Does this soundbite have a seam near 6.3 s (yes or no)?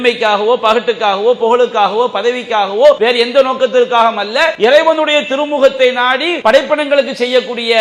yes